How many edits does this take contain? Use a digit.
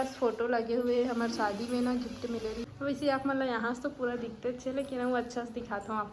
1